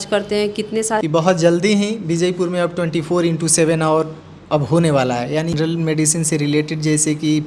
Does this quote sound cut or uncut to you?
cut